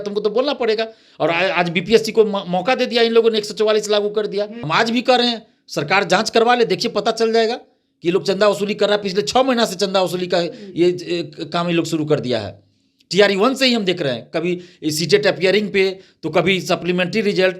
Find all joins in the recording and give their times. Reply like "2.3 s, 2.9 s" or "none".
4.6 s